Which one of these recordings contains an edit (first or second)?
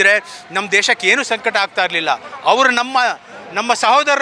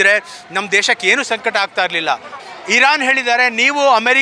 second